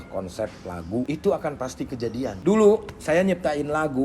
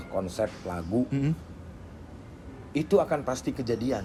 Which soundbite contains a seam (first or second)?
first